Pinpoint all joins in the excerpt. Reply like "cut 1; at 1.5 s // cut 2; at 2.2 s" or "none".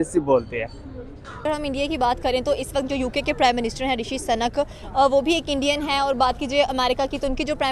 cut 1; at 1.4 s